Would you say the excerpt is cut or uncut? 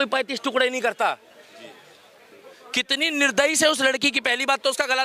uncut